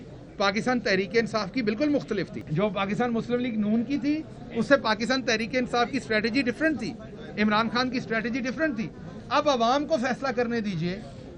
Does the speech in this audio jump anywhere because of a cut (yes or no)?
yes